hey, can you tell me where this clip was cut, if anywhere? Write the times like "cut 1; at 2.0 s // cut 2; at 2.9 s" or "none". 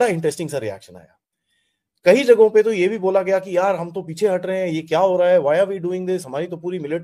none